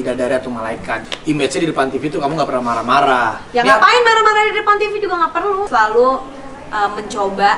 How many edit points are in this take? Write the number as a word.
two